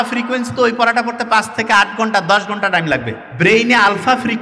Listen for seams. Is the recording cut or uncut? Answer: cut